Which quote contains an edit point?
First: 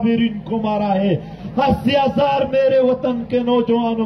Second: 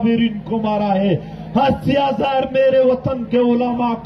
first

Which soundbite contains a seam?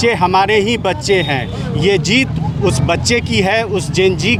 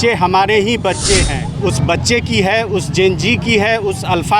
second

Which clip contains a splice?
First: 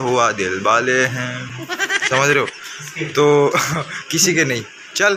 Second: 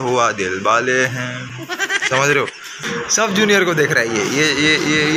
second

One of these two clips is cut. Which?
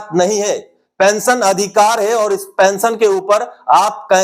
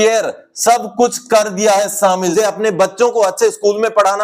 second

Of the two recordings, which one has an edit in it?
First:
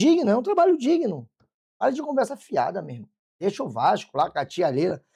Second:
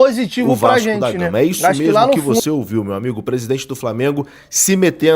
second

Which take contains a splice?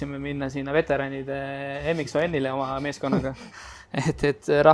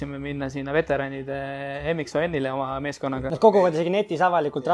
second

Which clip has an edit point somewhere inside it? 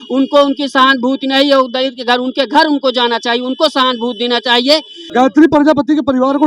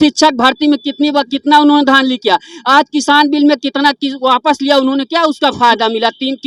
first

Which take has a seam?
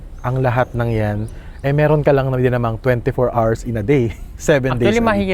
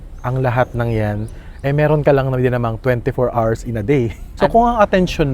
second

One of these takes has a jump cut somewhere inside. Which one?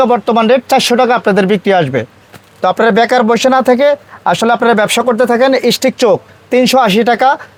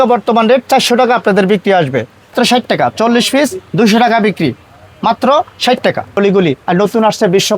second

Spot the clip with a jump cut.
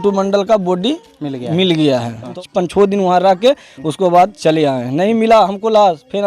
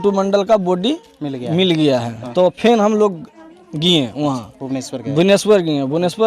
first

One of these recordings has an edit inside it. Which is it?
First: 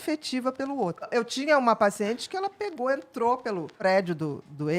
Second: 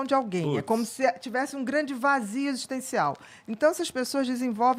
first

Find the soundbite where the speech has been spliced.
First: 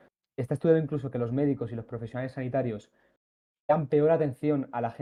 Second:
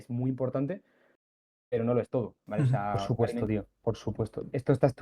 second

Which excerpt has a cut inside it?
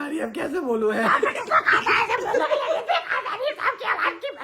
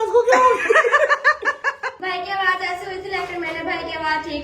second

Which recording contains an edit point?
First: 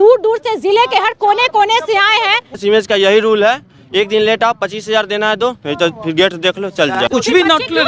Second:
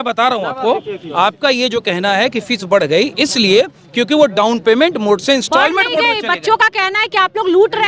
first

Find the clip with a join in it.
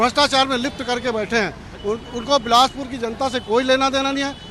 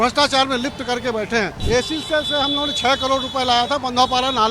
second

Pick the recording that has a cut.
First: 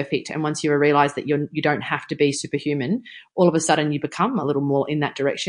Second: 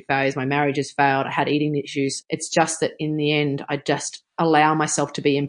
second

